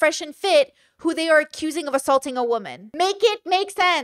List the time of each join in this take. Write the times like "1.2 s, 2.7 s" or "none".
2.8 s